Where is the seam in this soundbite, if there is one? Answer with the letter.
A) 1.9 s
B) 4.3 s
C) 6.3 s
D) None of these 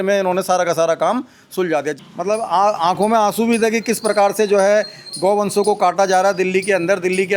A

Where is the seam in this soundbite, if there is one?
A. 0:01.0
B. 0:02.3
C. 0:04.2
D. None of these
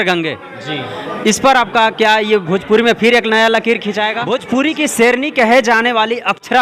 C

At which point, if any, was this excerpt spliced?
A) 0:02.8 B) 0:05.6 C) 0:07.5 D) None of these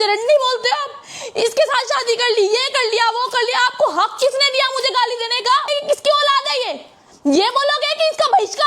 B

